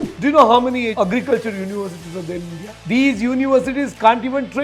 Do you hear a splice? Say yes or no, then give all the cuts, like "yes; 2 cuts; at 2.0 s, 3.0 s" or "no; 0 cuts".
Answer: yes; 2 cuts; at 0.9 s, 2.7 s